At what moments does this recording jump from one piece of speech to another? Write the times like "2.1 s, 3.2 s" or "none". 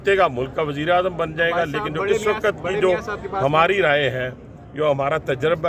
none